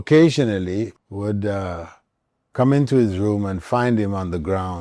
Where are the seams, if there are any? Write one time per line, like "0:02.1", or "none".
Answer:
0:01.0